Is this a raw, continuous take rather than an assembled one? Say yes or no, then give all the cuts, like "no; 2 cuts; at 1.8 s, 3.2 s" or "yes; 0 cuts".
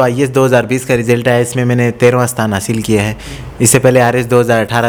yes; 0 cuts